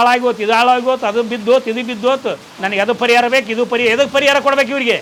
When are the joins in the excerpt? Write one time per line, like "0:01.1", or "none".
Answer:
none